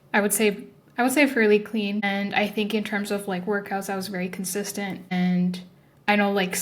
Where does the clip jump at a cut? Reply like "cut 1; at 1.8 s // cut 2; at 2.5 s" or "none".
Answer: cut 1; at 2.0 s // cut 2; at 5.1 s